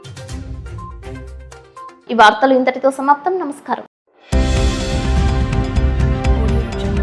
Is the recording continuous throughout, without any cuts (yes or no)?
yes